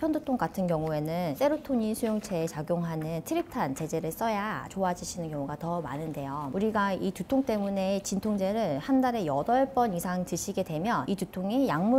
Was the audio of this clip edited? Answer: no; 0 cuts

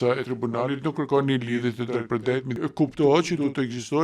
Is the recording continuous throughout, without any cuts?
no; 1 cut; at 2.6 s

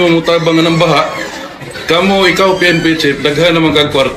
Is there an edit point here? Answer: yes; 1 cut; at 2.1 s

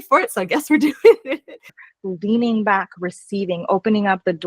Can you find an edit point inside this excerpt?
yes; 1 cut; at 1.9 s

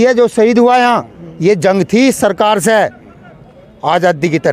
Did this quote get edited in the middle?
no; 0 cuts

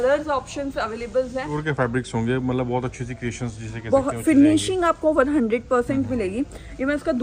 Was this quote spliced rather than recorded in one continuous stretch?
yes; 1 cut; at 1.5 s

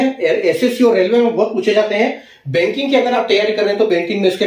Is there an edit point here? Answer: no; 0 cuts

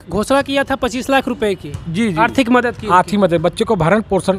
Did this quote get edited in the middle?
no; 0 cuts

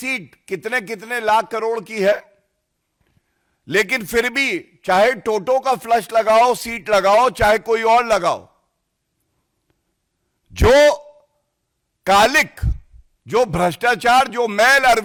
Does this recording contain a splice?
no; 0 cuts

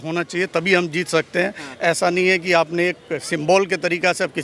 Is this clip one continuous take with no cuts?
yes; 0 cuts

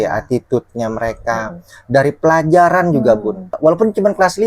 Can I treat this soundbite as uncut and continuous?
no; 1 cut; at 3.6 s

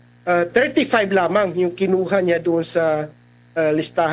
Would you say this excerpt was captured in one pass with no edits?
yes; 0 cuts

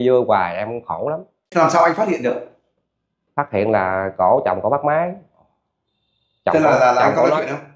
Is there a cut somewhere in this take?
yes; 1 cut; at 1.4 s

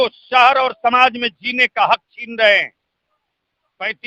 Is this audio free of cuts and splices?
yes; 0 cuts

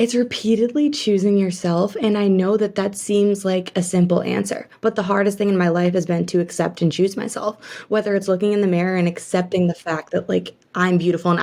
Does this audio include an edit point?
no; 0 cuts

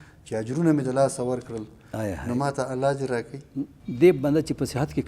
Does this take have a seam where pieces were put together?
yes; 1 cut; at 3.8 s

